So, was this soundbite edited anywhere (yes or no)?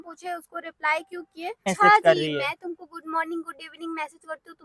yes